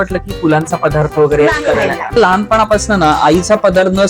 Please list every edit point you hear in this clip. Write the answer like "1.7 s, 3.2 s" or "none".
2.2 s